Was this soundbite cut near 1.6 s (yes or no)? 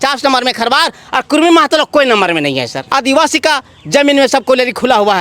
no